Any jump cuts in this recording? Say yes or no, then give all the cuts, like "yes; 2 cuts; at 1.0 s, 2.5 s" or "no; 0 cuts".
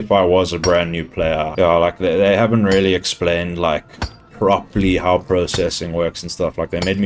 yes; 2 cuts; at 1.5 s, 4.2 s